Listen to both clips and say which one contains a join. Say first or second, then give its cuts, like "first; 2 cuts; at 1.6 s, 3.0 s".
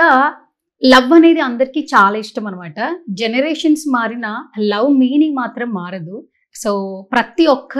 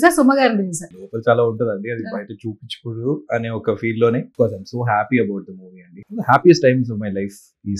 second; 3 cuts; at 1.0 s, 4.3 s, 5.9 s